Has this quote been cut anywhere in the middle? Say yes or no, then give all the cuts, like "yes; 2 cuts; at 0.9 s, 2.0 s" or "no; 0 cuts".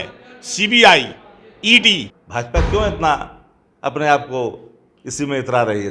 yes; 1 cut; at 2.2 s